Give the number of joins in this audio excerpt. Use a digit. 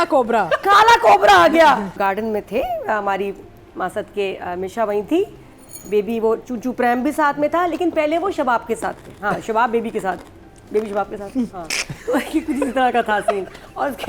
1